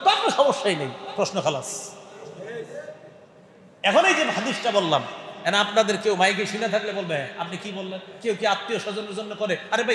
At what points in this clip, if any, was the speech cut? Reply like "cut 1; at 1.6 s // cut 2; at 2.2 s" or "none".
none